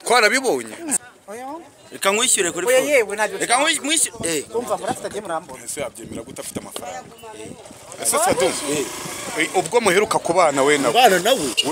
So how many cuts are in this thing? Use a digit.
1